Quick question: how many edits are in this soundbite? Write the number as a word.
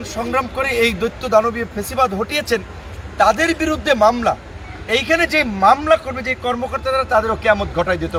zero